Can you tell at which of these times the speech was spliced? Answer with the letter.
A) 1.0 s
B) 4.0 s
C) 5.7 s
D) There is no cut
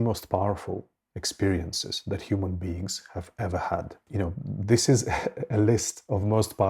B